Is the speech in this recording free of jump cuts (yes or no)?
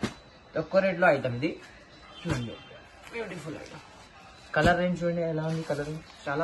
yes